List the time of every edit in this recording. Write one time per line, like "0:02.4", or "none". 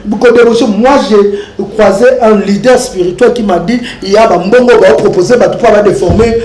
none